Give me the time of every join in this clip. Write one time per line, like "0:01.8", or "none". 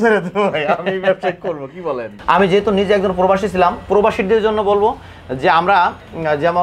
0:02.1